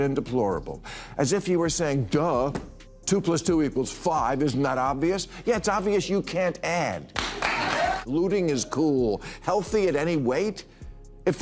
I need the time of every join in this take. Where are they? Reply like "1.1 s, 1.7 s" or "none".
8.0 s